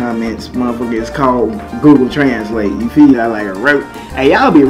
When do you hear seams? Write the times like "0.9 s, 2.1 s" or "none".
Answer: 3.1 s